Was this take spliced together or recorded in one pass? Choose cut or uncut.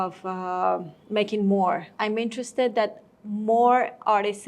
cut